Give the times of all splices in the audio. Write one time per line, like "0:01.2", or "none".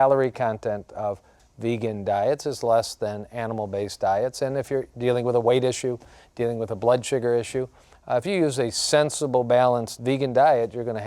0:09.9